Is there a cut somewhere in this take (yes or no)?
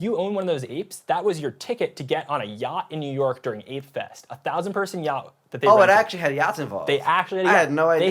no